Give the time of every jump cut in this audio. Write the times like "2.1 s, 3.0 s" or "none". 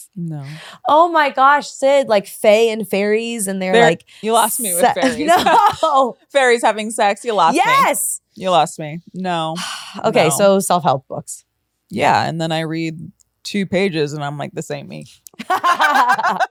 none

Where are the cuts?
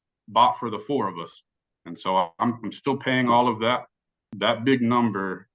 4.2 s

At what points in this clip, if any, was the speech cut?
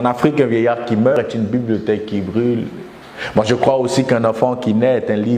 1.1 s

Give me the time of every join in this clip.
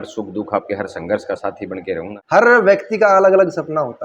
2.2 s

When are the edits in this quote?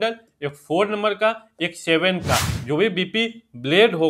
2.5 s

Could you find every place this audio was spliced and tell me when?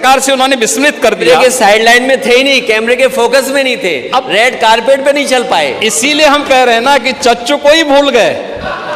none

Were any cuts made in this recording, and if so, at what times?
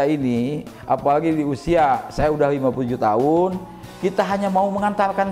none

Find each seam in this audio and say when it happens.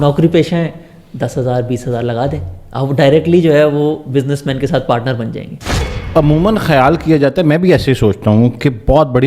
5.7 s

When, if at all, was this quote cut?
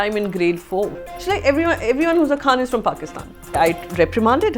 1.1 s, 3.6 s

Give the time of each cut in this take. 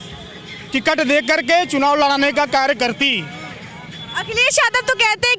none

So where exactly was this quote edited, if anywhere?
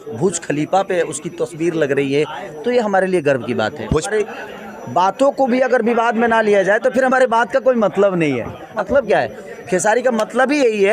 4.1 s, 8.8 s

